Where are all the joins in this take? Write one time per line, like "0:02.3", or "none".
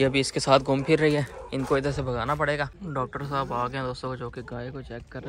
0:02.8